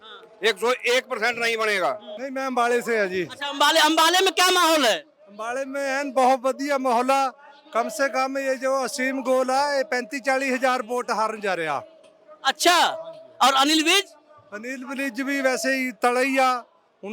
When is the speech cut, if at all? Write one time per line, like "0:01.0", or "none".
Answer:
none